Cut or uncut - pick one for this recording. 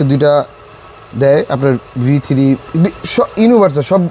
uncut